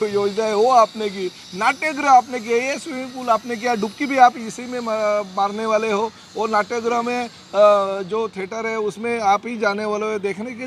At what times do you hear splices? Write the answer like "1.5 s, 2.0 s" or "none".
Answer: none